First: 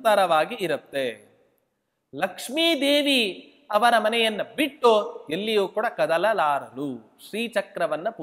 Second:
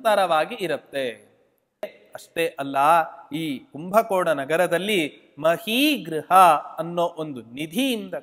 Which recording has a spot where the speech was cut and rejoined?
second; 1 cut; at 2.0 s

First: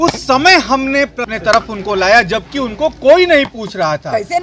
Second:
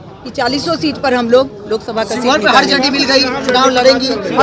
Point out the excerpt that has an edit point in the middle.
first; 1 cut; at 1.3 s

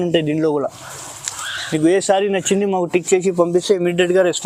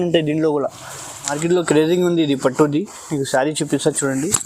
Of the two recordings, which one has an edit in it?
second; 1 cut; at 1.3 s

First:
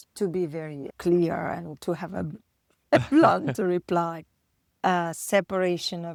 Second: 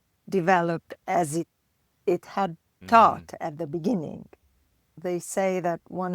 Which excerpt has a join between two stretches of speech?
second; 1 cut; at 5.0 s

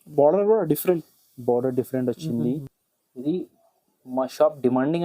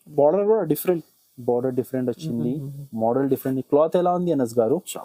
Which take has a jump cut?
first; 1 cut; at 2.8 s

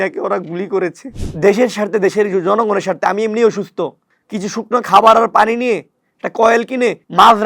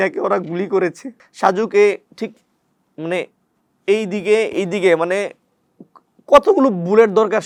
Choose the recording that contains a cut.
first; 1 cut; at 1.2 s

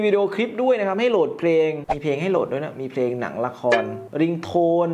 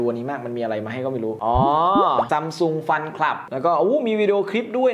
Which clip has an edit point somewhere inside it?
first; 1 cut; at 1.8 s

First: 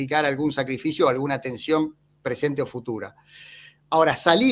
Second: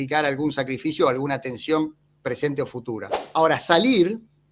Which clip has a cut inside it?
second; 1 cut; at 3.1 s

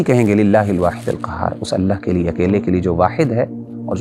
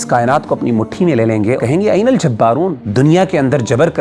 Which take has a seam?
second; 2 cuts; at 1.6 s, 2.8 s

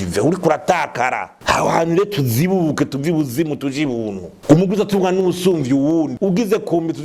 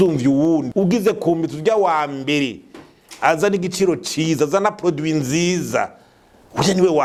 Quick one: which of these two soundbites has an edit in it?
first; 2 cuts; at 1.3 s, 4.3 s

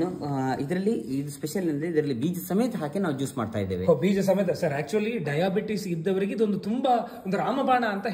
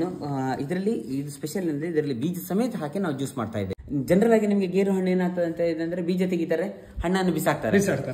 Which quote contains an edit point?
second; 1 cut; at 3.7 s

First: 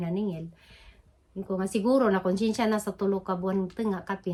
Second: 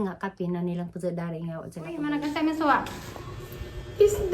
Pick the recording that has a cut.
second; 1 cut; at 2.0 s

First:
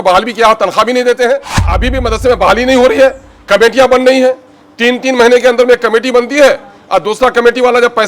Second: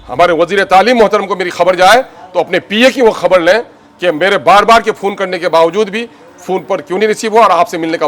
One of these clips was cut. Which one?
first; 1 cut; at 1.7 s

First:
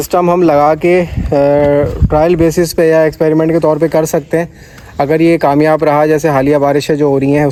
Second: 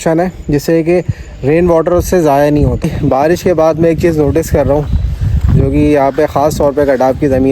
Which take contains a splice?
second; 1 cut; at 2.9 s

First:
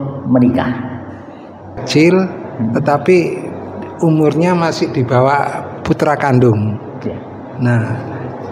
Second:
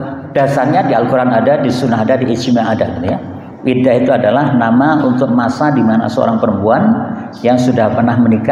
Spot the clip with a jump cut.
first; 1 cut; at 1.8 s

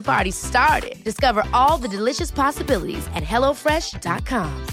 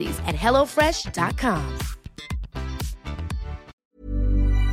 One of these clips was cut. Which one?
second; 1 cut; at 3.7 s

